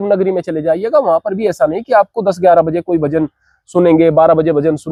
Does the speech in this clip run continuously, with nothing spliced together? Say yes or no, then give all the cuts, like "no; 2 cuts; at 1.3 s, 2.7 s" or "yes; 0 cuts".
yes; 0 cuts